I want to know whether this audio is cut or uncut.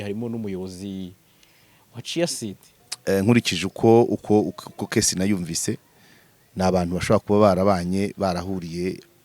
cut